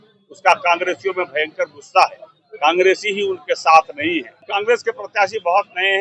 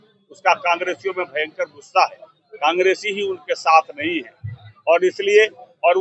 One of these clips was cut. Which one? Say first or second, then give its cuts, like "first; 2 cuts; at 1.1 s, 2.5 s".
first; 1 cut; at 4.4 s